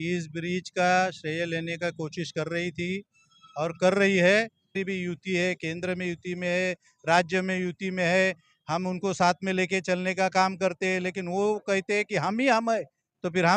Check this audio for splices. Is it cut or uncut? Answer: cut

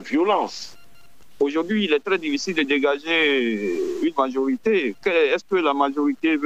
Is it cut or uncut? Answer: cut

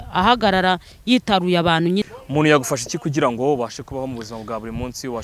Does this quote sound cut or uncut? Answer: cut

